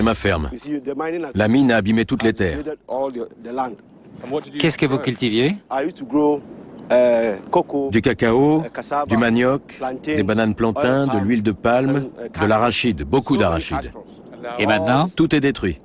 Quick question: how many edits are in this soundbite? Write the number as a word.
zero